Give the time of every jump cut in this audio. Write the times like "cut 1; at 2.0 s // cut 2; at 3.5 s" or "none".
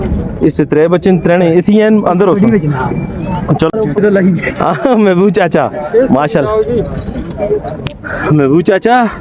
cut 1; at 3.7 s